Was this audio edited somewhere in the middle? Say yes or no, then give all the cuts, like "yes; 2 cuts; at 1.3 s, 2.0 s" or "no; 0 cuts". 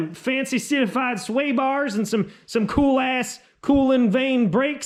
no; 0 cuts